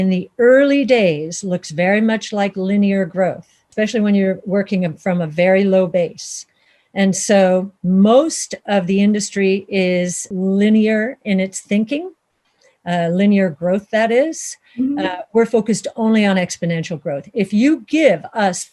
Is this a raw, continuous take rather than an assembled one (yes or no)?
no